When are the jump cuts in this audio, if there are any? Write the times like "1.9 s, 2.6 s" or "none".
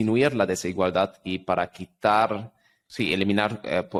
none